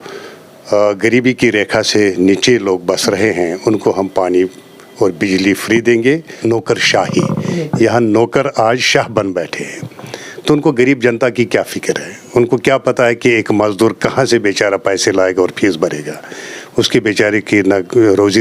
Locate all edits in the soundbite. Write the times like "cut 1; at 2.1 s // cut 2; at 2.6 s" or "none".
cut 1; at 6.3 s